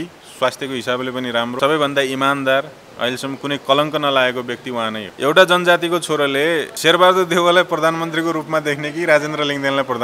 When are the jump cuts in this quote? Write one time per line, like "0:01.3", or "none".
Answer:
0:01.6
0:05.0
0:06.7